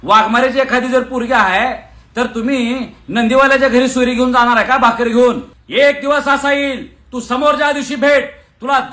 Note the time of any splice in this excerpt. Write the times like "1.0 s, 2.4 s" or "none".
5.5 s